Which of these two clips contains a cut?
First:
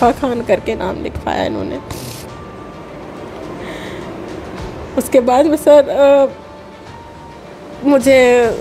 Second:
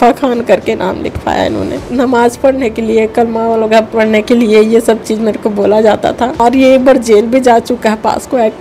second; 2 cuts; at 1.8 s, 6.4 s

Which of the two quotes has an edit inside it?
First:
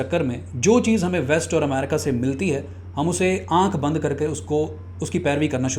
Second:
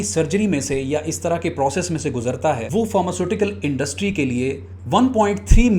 second; 2 cuts; at 2.6 s, 4.7 s

